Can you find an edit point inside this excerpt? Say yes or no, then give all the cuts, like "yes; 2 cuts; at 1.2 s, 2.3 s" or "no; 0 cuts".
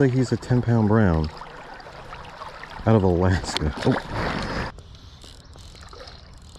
yes; 1 cut; at 4.7 s